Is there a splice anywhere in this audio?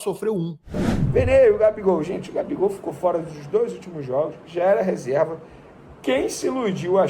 yes; 1 cut; at 0.9 s

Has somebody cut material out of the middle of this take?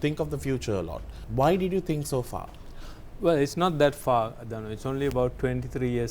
yes; 1 cut; at 1.2 s

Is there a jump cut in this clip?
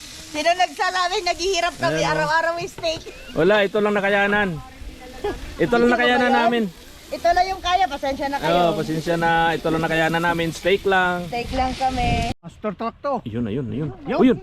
yes; 1 cut; at 12.5 s

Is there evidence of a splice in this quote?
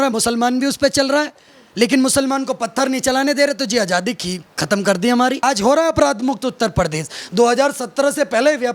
yes; 1 cut; at 5.4 s

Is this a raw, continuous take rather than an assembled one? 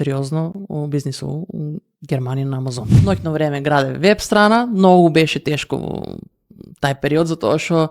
no; 1 cut; at 3.0 s

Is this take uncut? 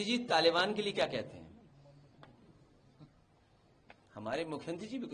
yes; 0 cuts

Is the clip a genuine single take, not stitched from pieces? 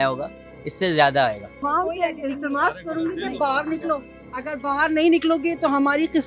no; 1 cut; at 1.5 s

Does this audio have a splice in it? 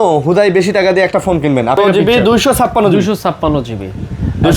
yes; 1 cut; at 1.8 s

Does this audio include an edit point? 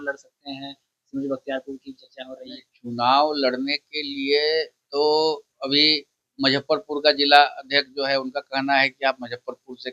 no; 0 cuts

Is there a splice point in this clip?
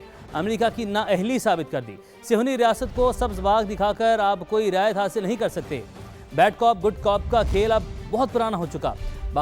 no; 0 cuts

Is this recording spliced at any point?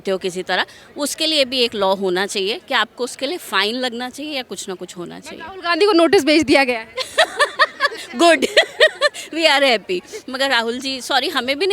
no; 0 cuts

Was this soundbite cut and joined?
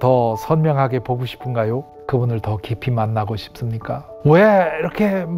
yes; 2 cuts; at 1.9 s, 4.1 s

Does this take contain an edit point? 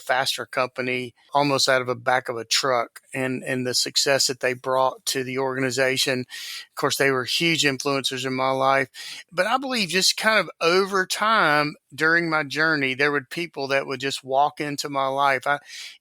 yes; 1 cut; at 1.3 s

